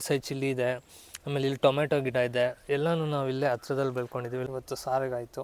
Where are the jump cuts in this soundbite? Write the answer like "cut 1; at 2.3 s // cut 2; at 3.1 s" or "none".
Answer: cut 1; at 4.5 s